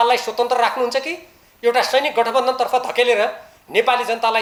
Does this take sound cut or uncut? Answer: uncut